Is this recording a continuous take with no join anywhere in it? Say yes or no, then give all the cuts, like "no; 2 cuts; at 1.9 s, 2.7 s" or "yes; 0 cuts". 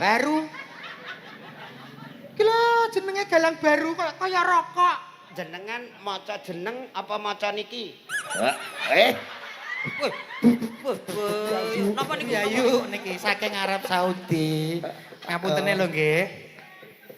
no; 1 cut; at 11.7 s